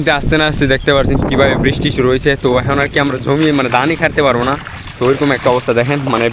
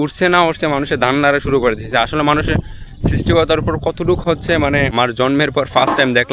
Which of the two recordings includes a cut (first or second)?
second